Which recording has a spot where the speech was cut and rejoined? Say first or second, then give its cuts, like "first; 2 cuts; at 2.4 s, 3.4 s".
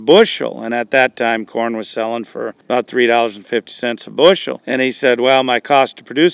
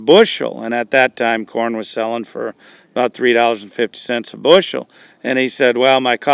first; 2 cuts; at 2.6 s, 4.6 s